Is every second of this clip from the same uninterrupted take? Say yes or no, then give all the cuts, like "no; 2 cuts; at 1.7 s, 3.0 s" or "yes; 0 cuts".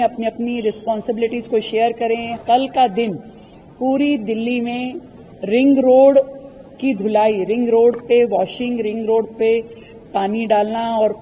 no; 1 cut; at 2.4 s